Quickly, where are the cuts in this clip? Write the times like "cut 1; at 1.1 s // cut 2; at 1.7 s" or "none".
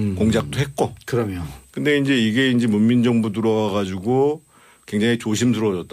none